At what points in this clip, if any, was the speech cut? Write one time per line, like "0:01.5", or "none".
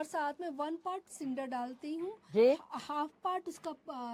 none